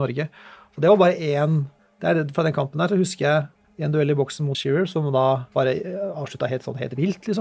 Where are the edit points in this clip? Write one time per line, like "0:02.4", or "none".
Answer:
0:03.6
0:05.5